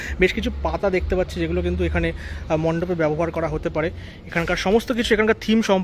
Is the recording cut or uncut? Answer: uncut